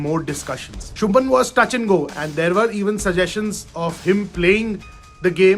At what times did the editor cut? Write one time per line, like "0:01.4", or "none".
0:00.9
0:02.1